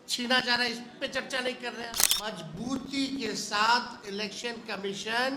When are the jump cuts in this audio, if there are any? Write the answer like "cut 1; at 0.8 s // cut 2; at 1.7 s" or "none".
cut 1; at 2.3 s